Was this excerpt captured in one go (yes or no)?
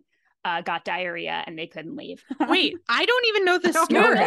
no